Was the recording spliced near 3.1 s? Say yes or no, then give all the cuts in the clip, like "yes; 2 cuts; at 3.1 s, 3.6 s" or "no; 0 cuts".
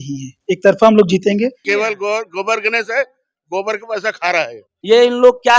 no; 2 cuts; at 1.6 s, 4.7 s